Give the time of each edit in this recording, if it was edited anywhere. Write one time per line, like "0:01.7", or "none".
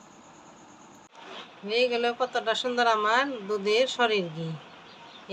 0:01.1